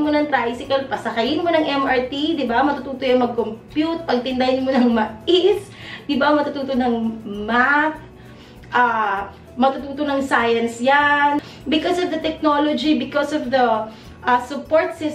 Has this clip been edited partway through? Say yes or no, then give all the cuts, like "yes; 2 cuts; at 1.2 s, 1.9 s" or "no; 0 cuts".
yes; 1 cut; at 11.5 s